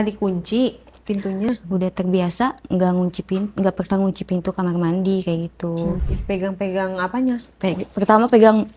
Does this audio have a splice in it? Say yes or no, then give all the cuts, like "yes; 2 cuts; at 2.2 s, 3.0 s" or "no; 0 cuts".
yes; 2 cuts; at 1.5 s, 6.1 s